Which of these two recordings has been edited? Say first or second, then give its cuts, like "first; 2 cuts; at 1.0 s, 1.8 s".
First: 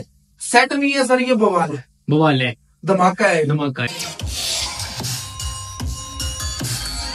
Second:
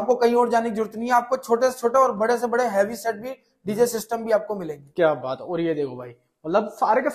first; 1 cut; at 3.9 s